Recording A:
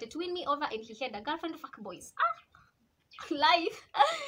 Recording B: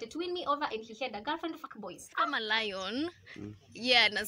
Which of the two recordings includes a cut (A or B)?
B